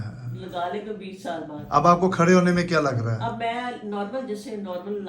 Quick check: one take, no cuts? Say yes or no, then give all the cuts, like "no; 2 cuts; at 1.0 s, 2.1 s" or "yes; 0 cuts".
no; 1 cut; at 1.6 s